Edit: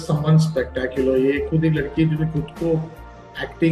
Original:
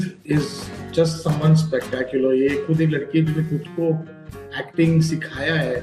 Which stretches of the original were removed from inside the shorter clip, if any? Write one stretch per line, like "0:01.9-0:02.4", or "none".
none